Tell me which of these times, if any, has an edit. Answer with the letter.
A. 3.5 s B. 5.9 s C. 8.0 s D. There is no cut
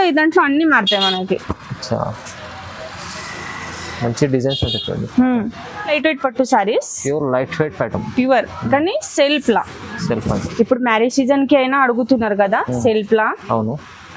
B